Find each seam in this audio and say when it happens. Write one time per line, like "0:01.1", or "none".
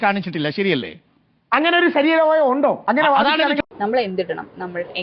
0:03.7